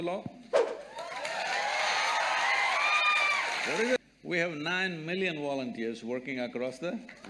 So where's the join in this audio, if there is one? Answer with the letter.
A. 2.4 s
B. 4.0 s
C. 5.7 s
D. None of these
B